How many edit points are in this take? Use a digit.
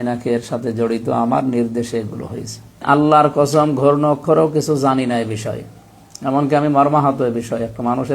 1